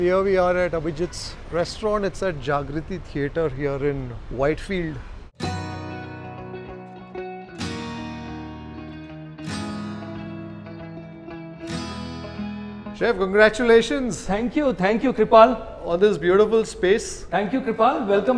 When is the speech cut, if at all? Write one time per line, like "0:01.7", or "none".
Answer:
none

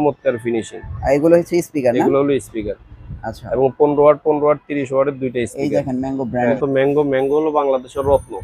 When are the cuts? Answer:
0:06.6

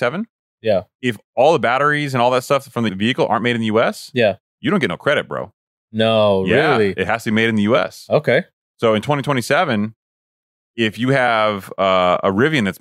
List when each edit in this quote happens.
0:02.9

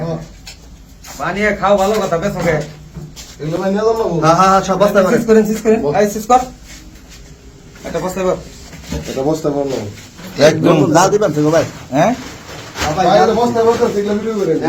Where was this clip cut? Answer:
none

